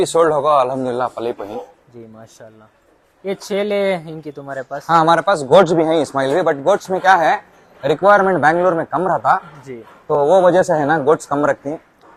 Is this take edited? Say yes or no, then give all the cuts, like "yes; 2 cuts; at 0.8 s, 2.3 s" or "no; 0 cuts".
no; 0 cuts